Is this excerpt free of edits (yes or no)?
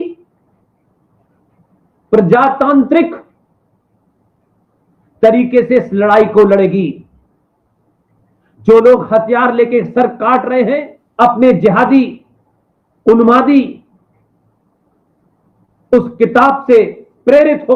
no